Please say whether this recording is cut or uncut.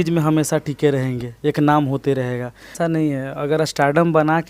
cut